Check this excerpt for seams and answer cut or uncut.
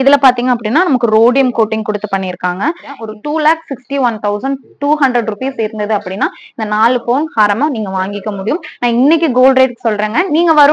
cut